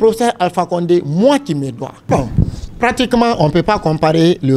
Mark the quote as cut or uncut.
cut